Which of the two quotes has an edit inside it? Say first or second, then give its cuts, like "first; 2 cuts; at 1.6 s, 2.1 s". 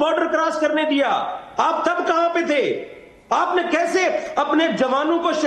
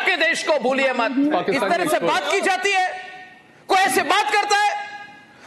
second; 1 cut; at 1.3 s